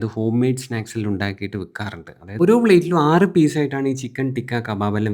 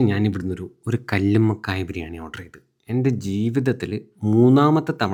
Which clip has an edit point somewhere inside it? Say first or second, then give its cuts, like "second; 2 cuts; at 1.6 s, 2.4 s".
first; 1 cut; at 2.4 s